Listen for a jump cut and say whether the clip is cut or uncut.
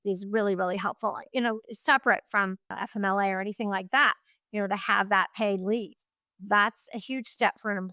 uncut